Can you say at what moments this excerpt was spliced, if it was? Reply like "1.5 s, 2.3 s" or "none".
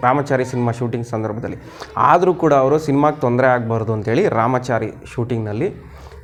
none